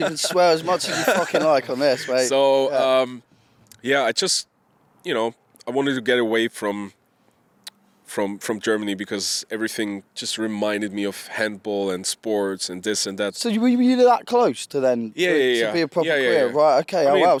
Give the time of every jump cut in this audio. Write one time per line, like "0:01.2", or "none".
none